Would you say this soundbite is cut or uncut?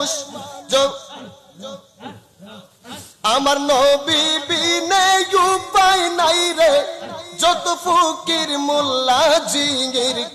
uncut